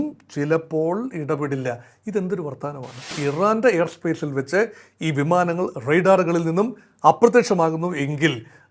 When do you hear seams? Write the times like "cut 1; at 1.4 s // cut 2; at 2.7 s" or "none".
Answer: cut 1; at 3.1 s